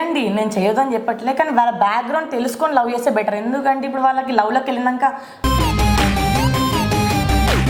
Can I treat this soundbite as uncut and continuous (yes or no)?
yes